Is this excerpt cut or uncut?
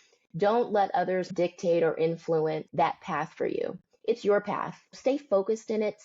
cut